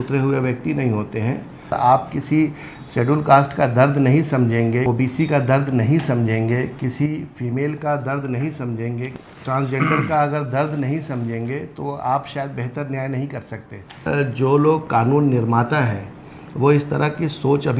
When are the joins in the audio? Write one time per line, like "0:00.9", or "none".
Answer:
0:01.7
0:04.9
0:09.1
0:14.1